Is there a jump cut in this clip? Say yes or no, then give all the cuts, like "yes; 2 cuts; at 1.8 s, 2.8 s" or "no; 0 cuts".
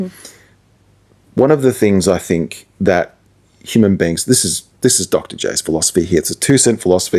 no; 0 cuts